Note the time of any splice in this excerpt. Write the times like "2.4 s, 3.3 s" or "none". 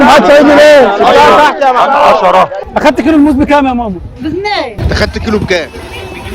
2.6 s, 4.8 s